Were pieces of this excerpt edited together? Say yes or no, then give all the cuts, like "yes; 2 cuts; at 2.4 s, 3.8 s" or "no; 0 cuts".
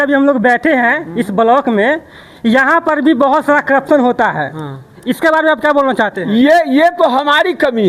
no; 0 cuts